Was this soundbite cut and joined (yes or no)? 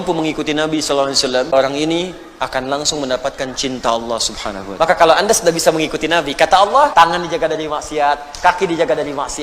yes